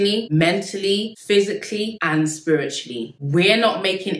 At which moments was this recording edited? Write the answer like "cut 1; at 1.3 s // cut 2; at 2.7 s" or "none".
cut 1; at 1.1 s // cut 2; at 3.0 s